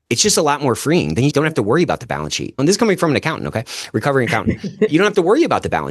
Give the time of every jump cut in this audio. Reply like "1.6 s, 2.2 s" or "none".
2.6 s, 4.9 s